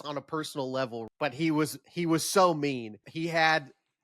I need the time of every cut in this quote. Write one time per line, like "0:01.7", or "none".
0:01.1
0:03.1